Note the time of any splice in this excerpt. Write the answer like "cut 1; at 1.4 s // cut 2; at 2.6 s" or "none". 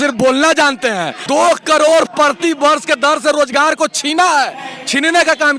cut 1; at 1.1 s